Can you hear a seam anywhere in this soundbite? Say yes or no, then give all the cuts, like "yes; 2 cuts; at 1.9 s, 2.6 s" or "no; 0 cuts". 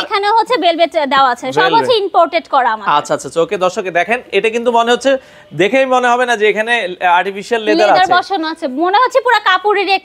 no; 0 cuts